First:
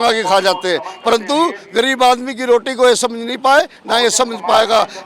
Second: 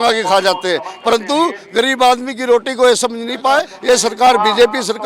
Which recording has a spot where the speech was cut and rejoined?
second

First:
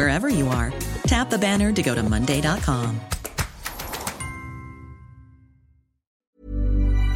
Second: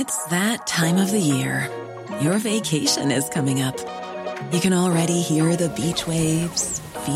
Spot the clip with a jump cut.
first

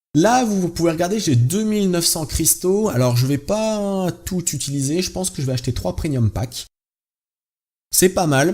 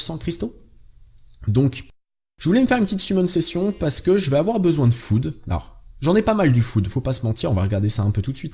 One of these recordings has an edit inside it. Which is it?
second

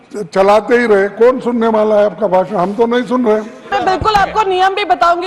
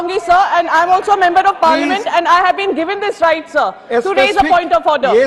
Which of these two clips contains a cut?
first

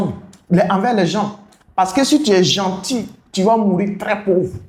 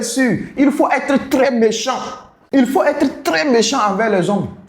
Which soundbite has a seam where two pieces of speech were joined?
second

